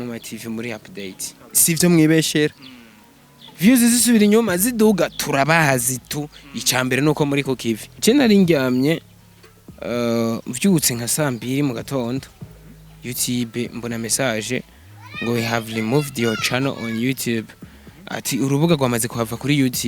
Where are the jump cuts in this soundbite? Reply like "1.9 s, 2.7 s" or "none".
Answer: 7.9 s

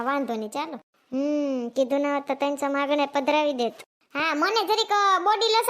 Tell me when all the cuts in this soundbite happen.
3.9 s

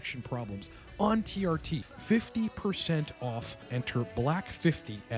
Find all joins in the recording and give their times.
1.8 s, 3.6 s

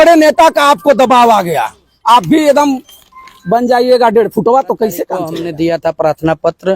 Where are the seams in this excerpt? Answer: 5.3 s

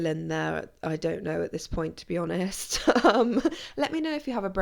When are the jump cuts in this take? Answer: none

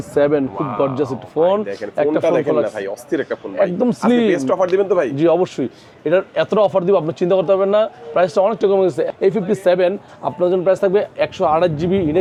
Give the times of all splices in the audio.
none

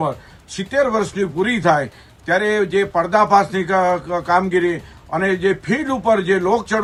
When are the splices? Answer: none

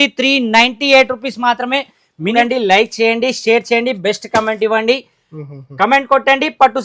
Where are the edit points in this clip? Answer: 2.3 s

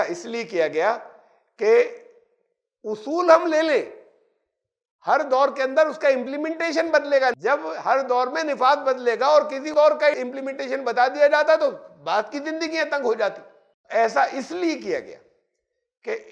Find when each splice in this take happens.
7.3 s, 9.6 s

